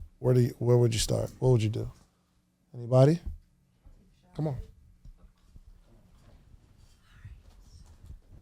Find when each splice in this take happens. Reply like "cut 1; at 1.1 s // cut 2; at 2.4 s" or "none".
none